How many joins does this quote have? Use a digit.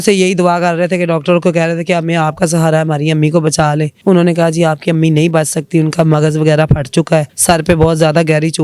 2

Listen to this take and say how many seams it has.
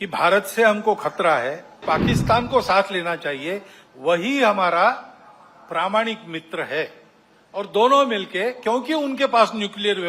1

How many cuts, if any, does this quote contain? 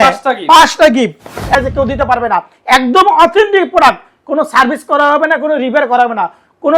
1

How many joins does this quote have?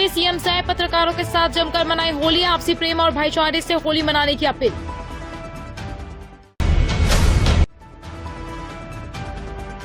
0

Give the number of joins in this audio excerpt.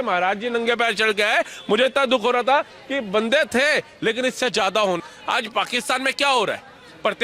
1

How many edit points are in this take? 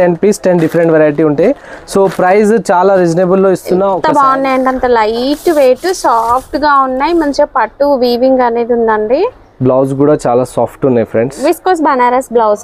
1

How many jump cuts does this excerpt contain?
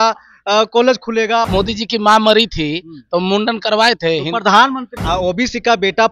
2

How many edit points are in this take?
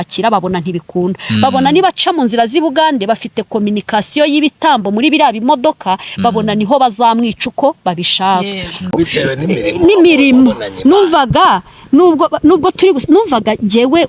1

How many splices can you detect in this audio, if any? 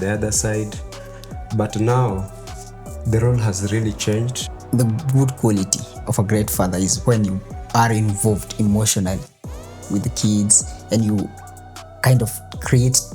1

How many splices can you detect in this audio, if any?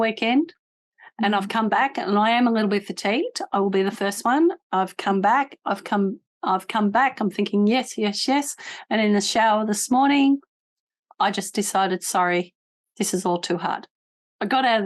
0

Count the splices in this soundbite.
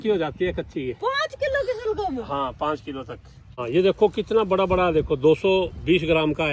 1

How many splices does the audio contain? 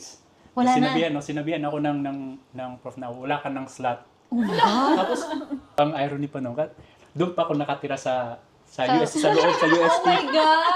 1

